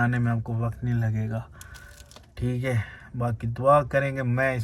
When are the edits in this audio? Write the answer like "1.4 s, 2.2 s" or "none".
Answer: none